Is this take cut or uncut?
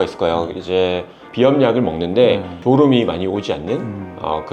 cut